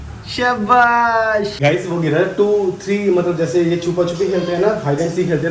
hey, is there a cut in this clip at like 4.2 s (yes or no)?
no